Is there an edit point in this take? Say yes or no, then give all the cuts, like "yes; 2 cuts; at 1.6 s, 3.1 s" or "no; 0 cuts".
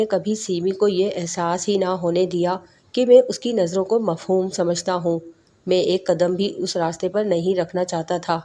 no; 0 cuts